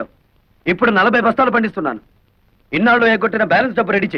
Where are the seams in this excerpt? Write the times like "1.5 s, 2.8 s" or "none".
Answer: none